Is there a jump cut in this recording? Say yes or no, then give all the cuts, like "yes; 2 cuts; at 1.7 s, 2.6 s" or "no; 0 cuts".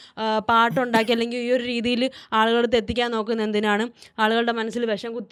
no; 0 cuts